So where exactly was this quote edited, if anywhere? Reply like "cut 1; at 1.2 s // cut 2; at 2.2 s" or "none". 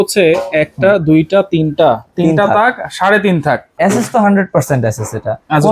cut 1; at 3.8 s